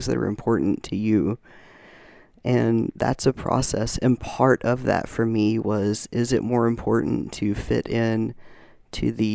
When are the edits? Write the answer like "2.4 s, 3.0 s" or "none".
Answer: none